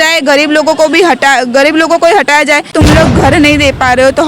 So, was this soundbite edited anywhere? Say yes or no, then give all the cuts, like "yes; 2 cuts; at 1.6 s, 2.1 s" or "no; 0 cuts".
yes; 1 cut; at 2.7 s